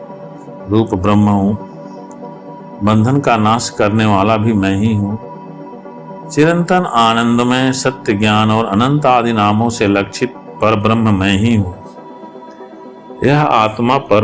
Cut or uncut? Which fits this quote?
uncut